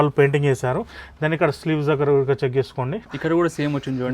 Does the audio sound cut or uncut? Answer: cut